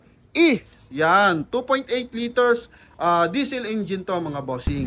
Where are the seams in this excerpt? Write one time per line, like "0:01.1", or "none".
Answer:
none